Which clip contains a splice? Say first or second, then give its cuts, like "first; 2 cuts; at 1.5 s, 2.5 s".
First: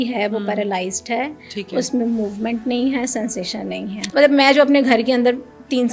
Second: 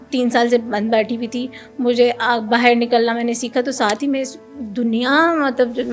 first; 1 cut; at 4.0 s